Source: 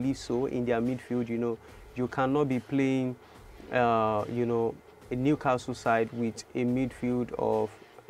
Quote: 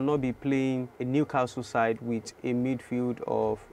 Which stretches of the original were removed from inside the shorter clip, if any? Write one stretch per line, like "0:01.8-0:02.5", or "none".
0:03.2-0:05.0